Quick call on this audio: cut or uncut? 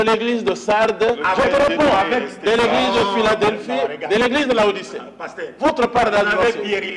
uncut